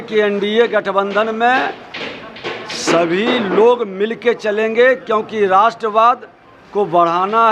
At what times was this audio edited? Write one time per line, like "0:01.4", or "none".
none